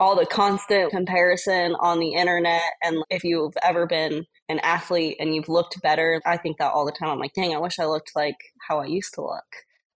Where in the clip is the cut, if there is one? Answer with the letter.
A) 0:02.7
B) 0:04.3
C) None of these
B